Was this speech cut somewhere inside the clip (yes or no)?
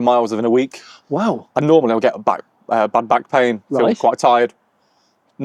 no